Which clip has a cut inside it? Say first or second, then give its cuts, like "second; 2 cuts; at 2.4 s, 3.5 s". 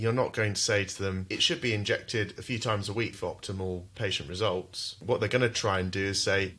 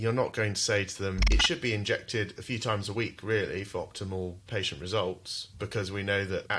first; 2 cuts; at 3.1 s, 5.0 s